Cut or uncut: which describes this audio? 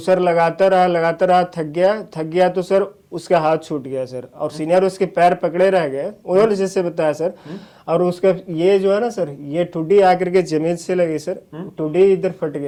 uncut